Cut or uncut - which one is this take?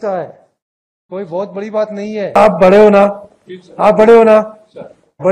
cut